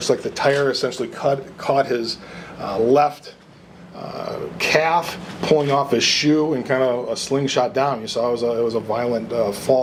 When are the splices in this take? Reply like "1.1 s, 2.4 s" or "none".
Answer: none